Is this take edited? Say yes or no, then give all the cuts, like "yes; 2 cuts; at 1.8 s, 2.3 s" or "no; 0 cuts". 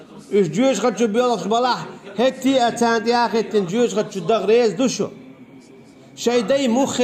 no; 0 cuts